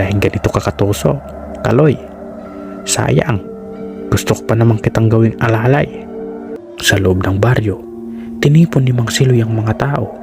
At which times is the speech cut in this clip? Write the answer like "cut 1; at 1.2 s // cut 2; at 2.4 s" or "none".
cut 1; at 6.5 s